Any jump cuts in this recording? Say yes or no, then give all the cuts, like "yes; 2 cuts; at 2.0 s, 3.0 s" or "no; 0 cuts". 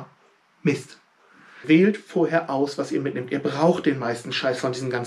yes; 1 cut; at 1.6 s